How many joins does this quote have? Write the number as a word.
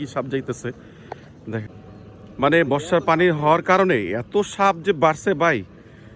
one